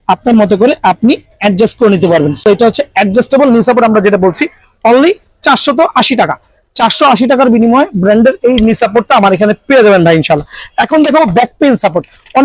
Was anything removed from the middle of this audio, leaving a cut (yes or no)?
no